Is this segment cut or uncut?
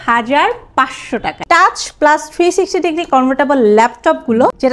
cut